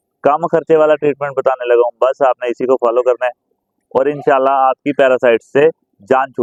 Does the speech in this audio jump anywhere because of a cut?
no; 0 cuts

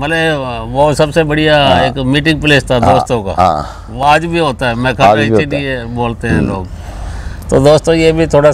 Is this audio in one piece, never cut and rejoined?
yes; 0 cuts

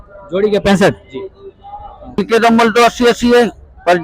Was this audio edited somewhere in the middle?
yes; 1 cut; at 2.2 s

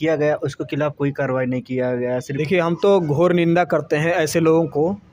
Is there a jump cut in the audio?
yes; 1 cut; at 2.3 s

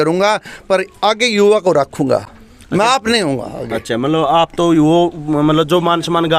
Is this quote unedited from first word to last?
yes; 0 cuts

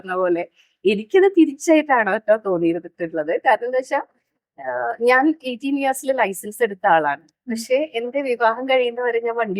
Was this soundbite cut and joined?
no; 0 cuts

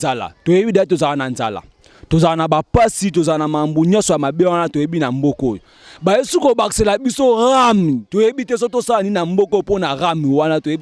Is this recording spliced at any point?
no; 0 cuts

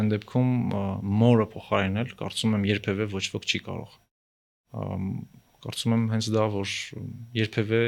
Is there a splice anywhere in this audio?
no; 0 cuts

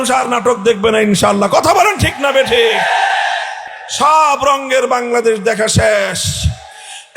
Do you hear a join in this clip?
yes; 1 cut; at 3.6 s

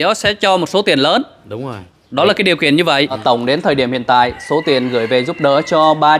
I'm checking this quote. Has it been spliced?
yes; 1 cut; at 3.2 s

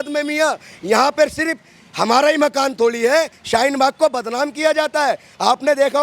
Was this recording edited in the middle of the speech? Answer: yes; 1 cut; at 3.4 s

